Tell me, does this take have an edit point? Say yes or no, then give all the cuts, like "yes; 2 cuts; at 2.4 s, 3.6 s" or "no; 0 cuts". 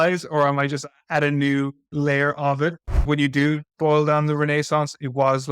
yes; 2 cuts; at 1.8 s, 3.0 s